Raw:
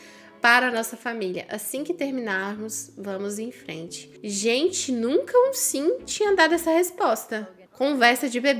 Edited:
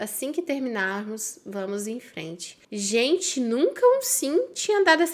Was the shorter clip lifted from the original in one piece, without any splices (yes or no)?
yes